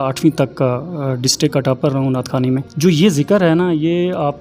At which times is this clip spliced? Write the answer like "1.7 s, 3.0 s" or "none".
2.7 s